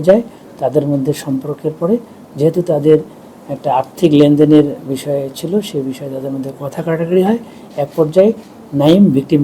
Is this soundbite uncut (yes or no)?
yes